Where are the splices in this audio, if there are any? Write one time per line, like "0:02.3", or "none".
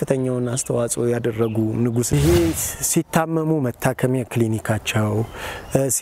0:02.1